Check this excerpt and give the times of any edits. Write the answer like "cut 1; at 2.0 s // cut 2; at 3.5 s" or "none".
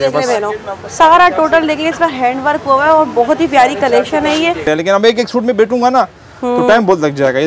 cut 1; at 4.7 s